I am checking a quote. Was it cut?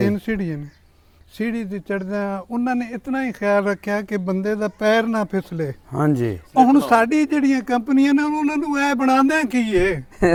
no; 0 cuts

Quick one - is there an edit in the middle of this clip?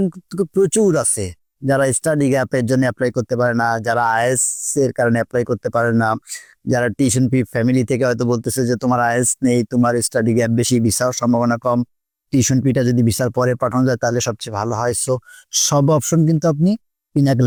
no; 0 cuts

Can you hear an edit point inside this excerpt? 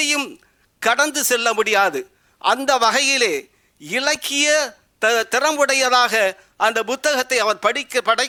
no; 0 cuts

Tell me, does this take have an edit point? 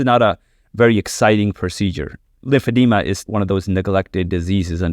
yes; 1 cut; at 2.2 s

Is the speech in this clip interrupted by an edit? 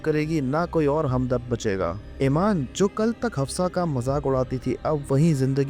yes; 2 cuts; at 2.0 s, 2.7 s

